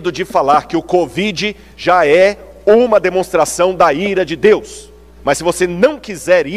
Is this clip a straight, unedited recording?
no; 1 cut; at 5.0 s

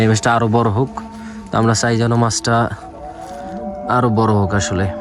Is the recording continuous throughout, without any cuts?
yes; 0 cuts

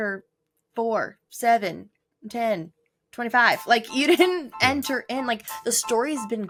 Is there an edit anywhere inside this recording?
no; 0 cuts

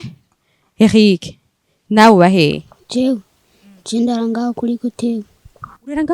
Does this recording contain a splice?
yes; 1 cut; at 2.7 s

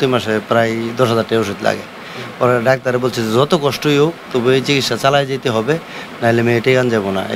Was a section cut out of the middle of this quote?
no; 0 cuts

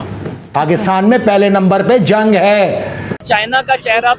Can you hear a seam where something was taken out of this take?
yes; 1 cut; at 3.2 s

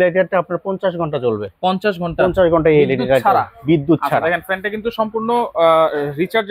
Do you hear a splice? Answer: no; 0 cuts

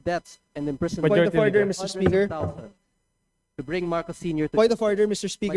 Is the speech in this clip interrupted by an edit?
no; 0 cuts

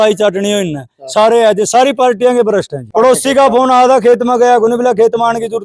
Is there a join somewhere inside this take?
yes; 1 cut; at 2.8 s

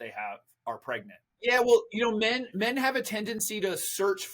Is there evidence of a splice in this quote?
yes; 1 cut; at 1.4 s

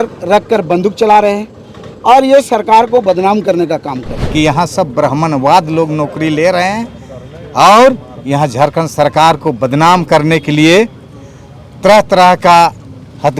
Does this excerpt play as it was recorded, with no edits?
no; 1 cut; at 4.1 s

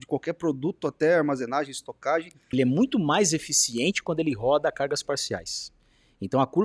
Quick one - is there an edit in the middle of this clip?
yes; 1 cut; at 2.4 s

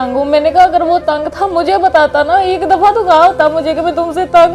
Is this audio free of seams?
yes; 0 cuts

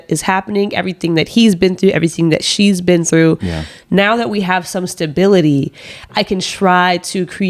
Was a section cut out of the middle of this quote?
no; 0 cuts

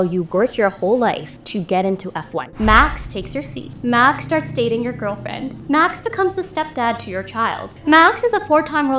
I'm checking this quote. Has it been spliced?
yes; 5 cuts; at 1.3 s, 2.4 s, 3.6 s, 5.5 s, 7.7 s

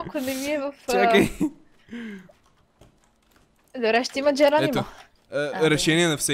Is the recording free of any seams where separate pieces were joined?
yes; 0 cuts

